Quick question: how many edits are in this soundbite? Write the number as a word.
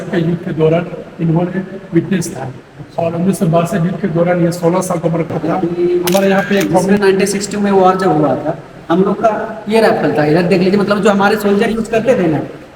one